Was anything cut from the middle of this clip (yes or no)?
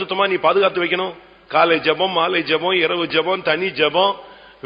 no